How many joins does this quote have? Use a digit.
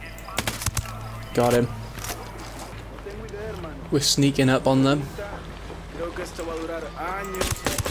1